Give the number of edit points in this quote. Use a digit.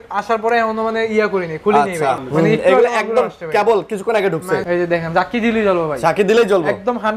2